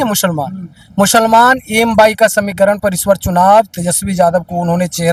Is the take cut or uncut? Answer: uncut